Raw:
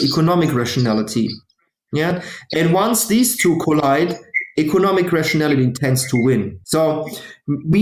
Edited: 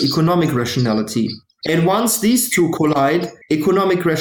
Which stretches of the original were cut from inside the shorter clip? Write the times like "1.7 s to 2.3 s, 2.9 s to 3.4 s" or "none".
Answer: 1.5 s to 2.4 s, 4.2 s to 4.4 s